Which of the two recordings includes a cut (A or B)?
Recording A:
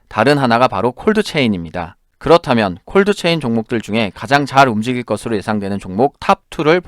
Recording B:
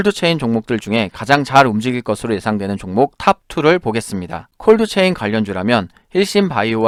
A